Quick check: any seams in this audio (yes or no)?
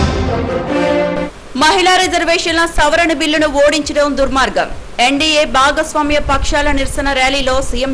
yes